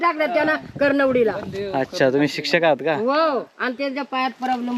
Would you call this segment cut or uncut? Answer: uncut